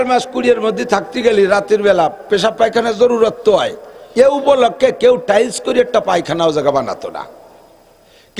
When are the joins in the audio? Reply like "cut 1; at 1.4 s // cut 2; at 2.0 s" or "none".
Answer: none